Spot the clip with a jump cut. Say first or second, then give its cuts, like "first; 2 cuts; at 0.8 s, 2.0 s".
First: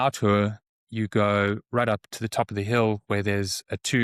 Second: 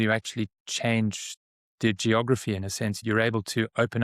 second; 1 cut; at 3.0 s